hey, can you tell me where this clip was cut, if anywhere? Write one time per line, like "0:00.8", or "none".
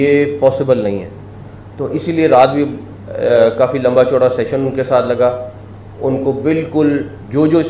none